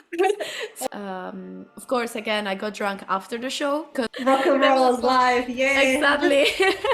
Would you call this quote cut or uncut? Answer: cut